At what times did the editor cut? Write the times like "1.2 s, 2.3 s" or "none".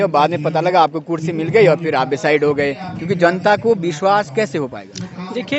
none